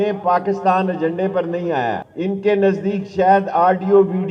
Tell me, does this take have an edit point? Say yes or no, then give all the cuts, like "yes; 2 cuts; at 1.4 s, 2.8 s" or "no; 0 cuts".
yes; 1 cut; at 2.1 s